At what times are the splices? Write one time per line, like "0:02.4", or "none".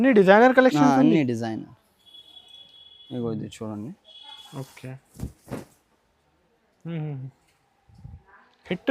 none